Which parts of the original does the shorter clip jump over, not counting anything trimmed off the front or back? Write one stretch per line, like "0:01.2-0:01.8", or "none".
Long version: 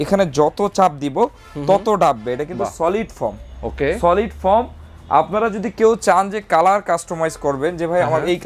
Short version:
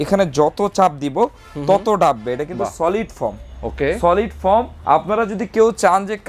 0:04.7-0:05.0